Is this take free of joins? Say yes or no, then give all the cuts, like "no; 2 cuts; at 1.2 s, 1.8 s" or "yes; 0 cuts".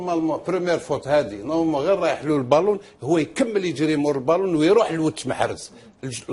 no; 1 cut; at 1.2 s